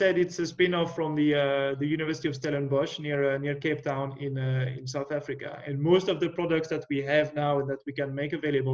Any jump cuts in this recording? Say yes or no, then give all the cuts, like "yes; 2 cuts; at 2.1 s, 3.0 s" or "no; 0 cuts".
no; 0 cuts